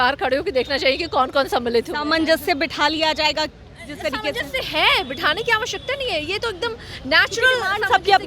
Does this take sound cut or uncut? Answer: uncut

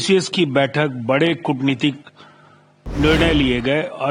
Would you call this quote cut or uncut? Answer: uncut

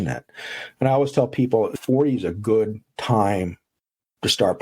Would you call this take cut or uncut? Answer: uncut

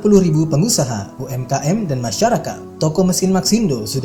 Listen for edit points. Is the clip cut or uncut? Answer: uncut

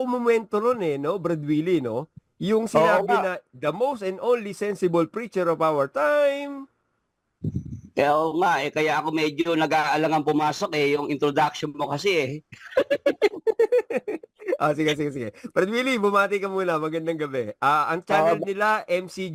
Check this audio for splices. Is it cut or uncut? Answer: uncut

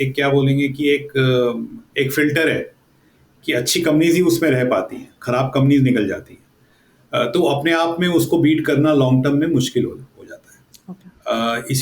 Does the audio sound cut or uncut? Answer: uncut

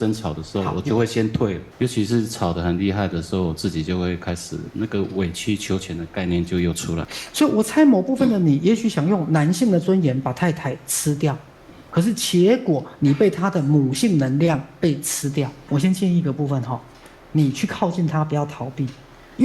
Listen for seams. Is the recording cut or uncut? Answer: cut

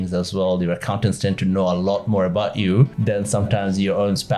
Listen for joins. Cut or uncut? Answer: cut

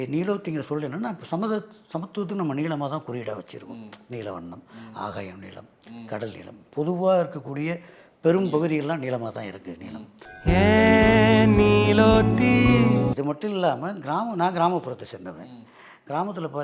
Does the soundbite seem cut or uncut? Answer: cut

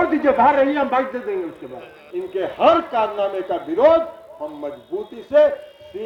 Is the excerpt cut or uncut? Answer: cut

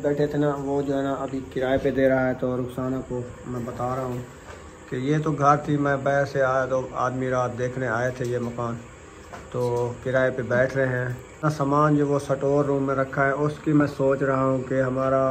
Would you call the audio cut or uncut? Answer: cut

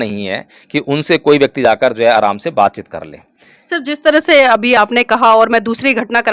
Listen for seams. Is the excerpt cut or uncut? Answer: uncut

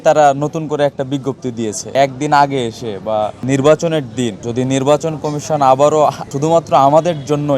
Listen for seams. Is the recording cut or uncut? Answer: uncut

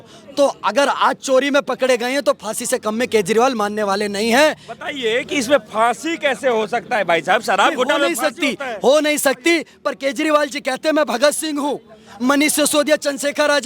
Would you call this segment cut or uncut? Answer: uncut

